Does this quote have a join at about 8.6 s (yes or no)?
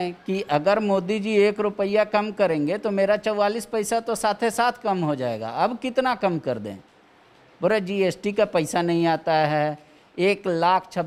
no